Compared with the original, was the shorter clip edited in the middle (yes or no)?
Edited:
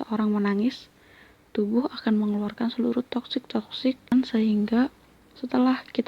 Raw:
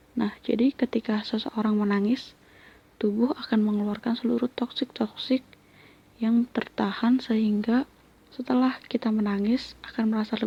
yes